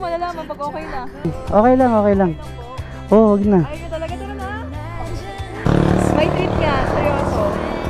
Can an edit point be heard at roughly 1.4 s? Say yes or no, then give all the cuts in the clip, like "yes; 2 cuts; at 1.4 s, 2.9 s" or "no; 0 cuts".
yes; 2 cuts; at 1.4 s, 5.7 s